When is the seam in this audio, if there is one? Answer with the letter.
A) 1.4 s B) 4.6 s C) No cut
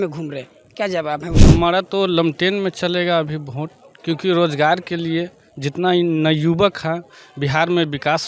A